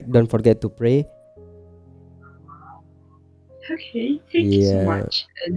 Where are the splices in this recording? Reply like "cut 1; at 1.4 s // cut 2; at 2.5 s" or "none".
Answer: none